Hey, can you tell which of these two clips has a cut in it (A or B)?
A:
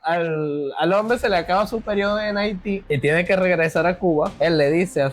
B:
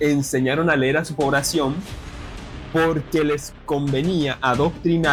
A